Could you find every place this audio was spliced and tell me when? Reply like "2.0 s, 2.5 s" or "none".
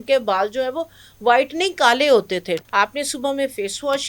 2.6 s